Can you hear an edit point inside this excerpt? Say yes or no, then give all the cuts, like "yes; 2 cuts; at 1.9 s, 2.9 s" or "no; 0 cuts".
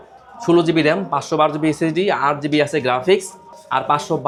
no; 0 cuts